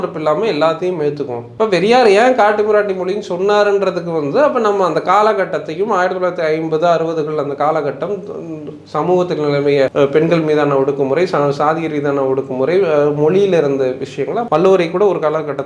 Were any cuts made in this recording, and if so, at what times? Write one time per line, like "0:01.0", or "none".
0:01.4
0:09.9
0:14.4

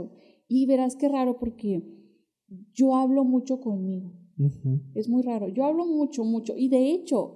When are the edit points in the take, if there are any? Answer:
none

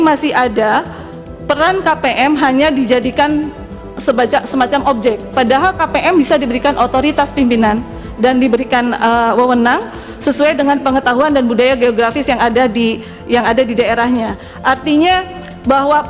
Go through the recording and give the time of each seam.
none

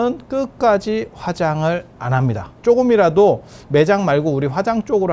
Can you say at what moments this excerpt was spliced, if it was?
0:02.5

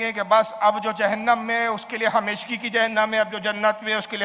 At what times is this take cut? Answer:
none

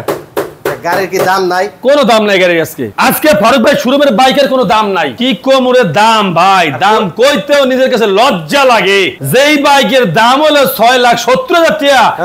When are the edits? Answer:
0:05.2

